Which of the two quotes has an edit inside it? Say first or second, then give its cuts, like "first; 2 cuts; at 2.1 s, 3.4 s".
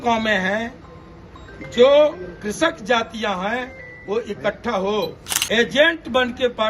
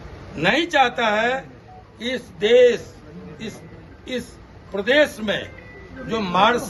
first; 1 cut; at 5.3 s